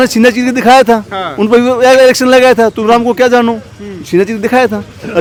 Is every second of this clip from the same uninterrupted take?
yes; 0 cuts

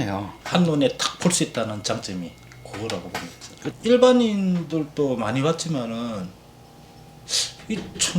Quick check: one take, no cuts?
no; 1 cut; at 3.8 s

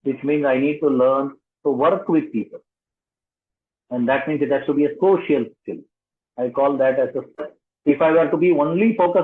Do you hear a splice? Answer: yes; 1 cut; at 7.4 s

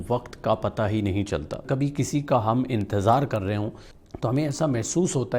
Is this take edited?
yes; 1 cut; at 1.6 s

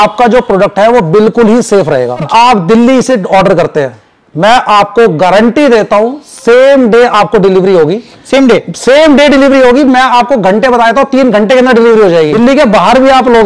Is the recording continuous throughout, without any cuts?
no; 2 cuts; at 2.3 s, 12.3 s

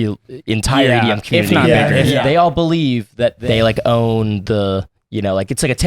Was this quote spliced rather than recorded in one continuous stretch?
yes; 2 cuts; at 2.2 s, 3.4 s

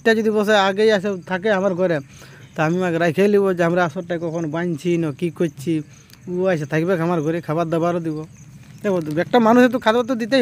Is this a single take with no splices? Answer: yes; 0 cuts

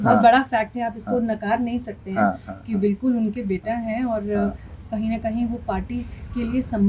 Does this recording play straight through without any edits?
yes; 0 cuts

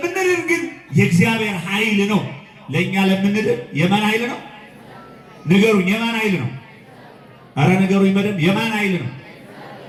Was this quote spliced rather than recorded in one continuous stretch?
no; 0 cuts

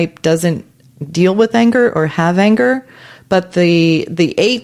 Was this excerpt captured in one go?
yes; 0 cuts

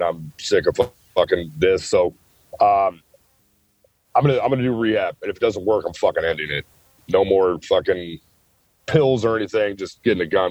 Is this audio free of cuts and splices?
yes; 0 cuts

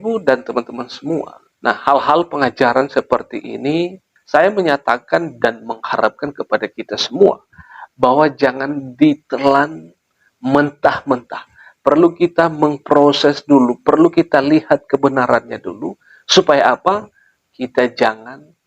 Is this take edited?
yes; 1 cut; at 1.4 s

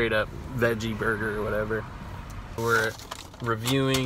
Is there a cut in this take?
yes; 1 cut; at 2.6 s

